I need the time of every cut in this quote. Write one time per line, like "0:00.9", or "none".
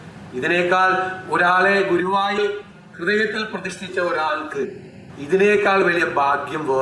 none